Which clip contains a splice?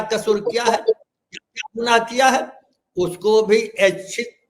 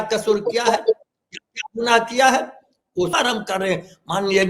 second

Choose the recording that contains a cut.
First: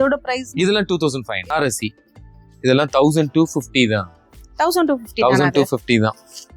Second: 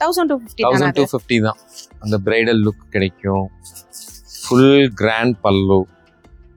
first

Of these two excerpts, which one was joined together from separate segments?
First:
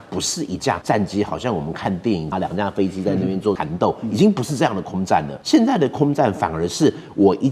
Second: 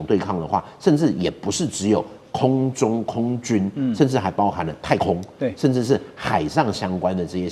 first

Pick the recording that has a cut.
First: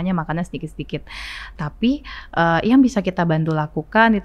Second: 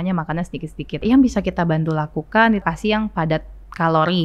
second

